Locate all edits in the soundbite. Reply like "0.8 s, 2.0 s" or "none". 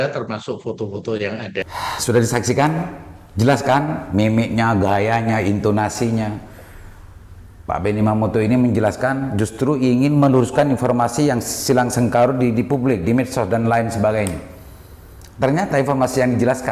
1.6 s